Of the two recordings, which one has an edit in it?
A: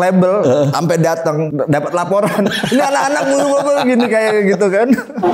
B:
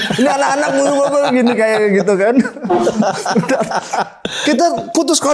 A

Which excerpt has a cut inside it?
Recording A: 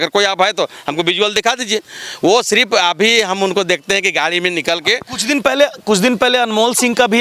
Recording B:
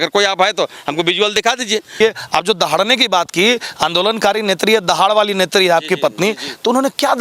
B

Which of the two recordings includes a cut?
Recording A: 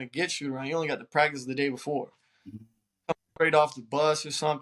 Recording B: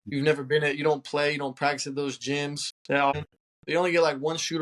B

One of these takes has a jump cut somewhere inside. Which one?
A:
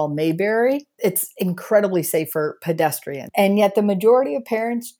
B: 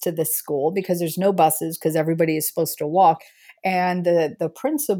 A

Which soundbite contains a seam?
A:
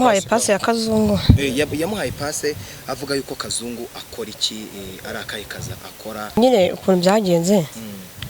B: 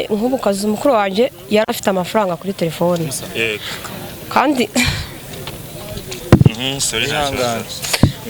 A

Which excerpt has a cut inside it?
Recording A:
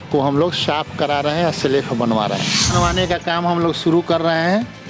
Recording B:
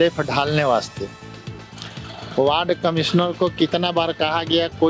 A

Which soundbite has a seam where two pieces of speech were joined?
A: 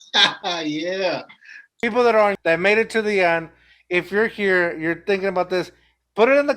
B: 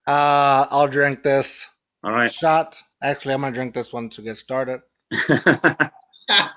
A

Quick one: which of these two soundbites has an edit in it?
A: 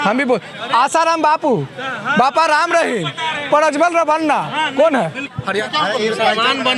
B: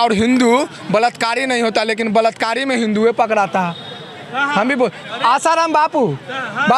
A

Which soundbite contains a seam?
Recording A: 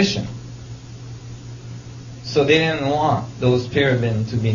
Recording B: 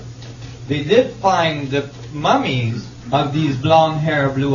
A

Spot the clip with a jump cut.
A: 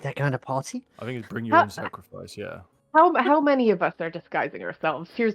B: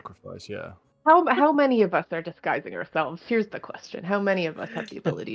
A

